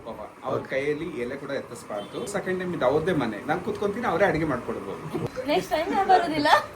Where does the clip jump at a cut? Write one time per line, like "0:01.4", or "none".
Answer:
0:02.3
0:05.2